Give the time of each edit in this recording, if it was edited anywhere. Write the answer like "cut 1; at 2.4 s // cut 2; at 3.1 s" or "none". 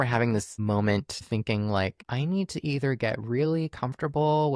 cut 1; at 1.2 s // cut 2; at 2.0 s